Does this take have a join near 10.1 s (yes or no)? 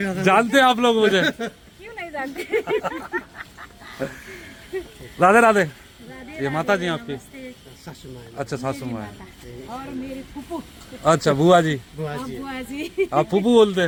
no